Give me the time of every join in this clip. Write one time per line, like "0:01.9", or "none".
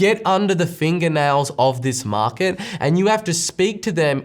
none